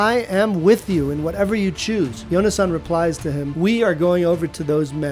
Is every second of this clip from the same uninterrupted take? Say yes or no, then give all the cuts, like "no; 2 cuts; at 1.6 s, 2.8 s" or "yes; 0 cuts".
no; 2 cuts; at 2.2 s, 3.5 s